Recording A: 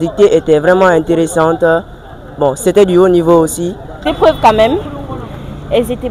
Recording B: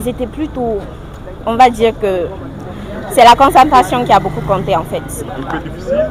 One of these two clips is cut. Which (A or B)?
A